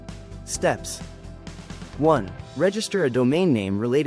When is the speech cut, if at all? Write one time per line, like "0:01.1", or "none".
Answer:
none